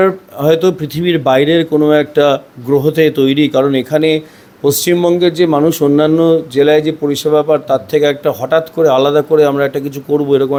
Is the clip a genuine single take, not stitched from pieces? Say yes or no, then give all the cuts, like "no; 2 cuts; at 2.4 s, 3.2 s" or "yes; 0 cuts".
yes; 0 cuts